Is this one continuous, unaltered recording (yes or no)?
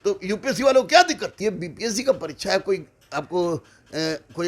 no